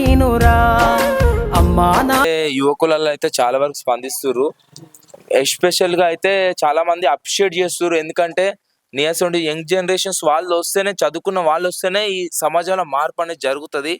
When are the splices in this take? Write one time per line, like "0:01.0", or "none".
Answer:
0:02.2